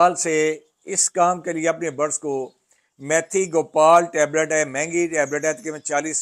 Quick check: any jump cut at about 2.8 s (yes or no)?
no